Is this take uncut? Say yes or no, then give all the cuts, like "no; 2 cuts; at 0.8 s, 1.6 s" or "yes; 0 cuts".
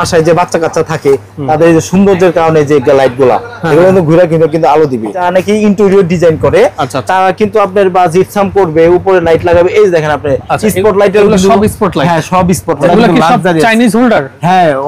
no; 2 cuts; at 5.2 s, 12.9 s